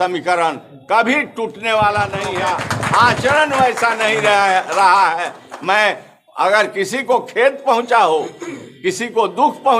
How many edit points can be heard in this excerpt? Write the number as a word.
one